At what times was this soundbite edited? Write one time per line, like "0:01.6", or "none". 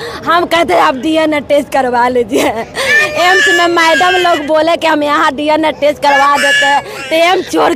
none